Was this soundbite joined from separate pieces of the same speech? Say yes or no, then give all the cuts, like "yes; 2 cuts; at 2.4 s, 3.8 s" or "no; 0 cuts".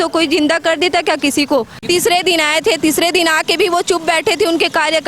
yes; 1 cut; at 1.8 s